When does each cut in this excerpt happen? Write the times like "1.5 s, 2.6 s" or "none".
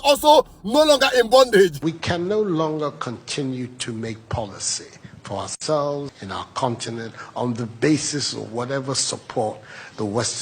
1.8 s, 6.2 s